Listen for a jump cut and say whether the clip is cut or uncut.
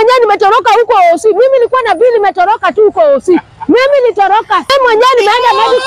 cut